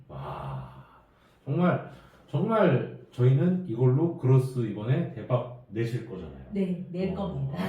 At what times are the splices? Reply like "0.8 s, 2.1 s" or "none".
none